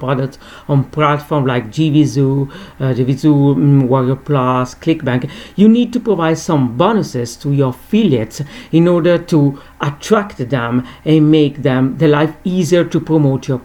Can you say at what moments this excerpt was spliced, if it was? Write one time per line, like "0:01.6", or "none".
none

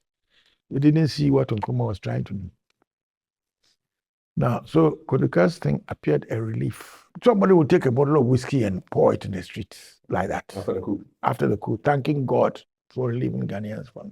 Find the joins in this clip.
0:07.1

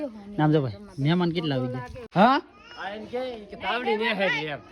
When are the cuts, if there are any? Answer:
0:02.0

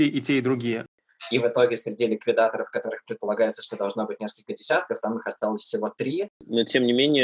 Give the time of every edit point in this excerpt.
0:01.0
0:06.4

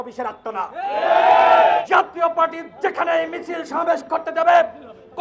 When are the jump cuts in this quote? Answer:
0:01.8

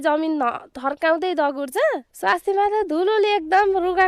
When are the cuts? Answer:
none

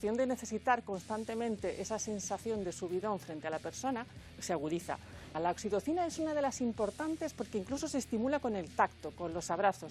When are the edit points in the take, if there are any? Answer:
none

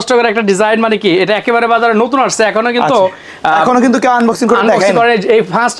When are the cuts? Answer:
none

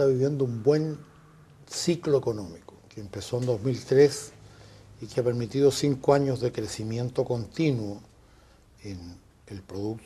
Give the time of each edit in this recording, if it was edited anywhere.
0:03.7

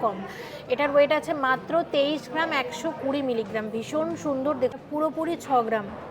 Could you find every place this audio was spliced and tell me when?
0:04.7

